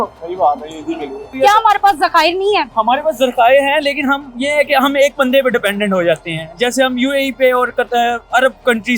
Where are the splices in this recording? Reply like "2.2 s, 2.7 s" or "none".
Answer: 1.2 s